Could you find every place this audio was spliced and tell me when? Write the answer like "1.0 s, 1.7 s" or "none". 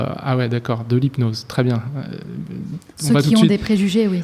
none